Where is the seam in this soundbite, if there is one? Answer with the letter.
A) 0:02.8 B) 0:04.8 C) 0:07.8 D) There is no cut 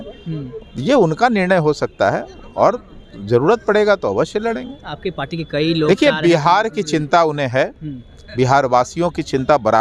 D